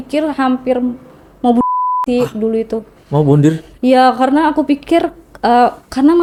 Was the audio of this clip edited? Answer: no; 0 cuts

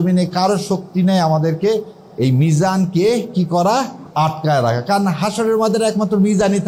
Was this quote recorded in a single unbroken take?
yes; 0 cuts

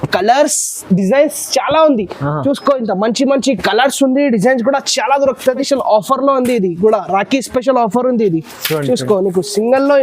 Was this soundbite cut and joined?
yes; 1 cut; at 5.7 s

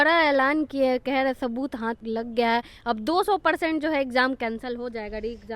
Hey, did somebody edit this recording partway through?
yes; 1 cut; at 2.0 s

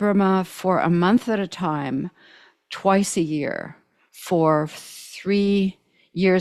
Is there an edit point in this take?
no; 0 cuts

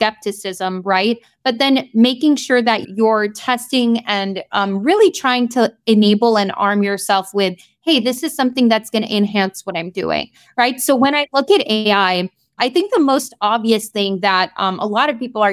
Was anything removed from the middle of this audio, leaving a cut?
no; 0 cuts

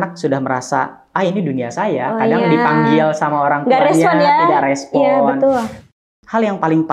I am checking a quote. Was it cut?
yes; 1 cut; at 5.9 s

